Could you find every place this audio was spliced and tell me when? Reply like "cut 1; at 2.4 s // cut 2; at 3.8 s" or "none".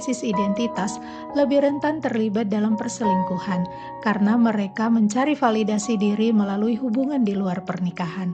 none